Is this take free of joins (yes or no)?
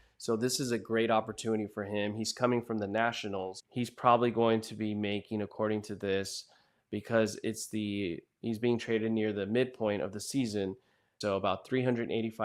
no